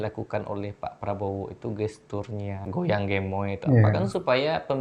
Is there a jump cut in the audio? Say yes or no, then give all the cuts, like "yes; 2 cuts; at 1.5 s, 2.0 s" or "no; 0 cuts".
yes; 1 cut; at 2.7 s